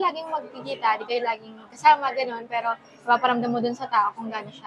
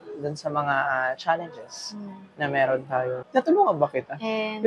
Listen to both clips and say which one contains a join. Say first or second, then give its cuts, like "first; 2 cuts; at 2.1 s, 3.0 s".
second; 1 cut; at 3.2 s